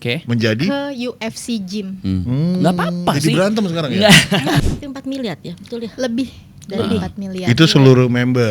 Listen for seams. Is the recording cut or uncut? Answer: cut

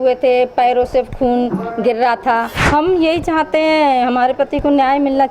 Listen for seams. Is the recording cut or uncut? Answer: cut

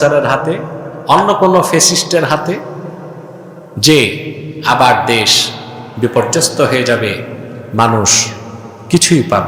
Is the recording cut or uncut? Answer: uncut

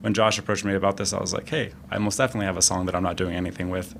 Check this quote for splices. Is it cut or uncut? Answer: uncut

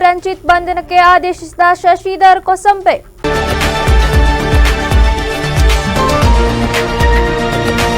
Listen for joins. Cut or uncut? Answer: cut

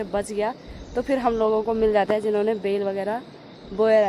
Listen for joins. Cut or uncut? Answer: uncut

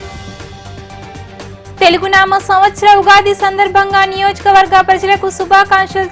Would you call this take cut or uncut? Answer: cut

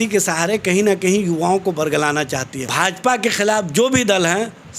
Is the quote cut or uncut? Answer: cut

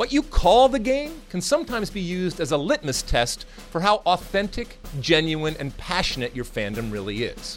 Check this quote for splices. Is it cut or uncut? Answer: uncut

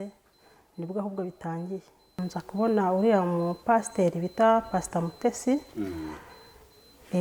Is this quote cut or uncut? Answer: cut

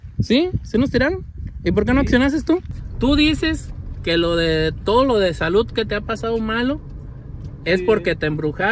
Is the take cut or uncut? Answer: cut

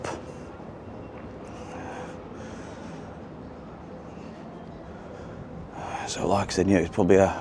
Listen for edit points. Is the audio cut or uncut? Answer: uncut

